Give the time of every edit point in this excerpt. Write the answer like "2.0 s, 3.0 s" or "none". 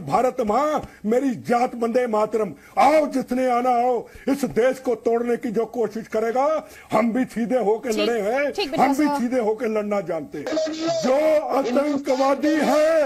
2.6 s, 10.5 s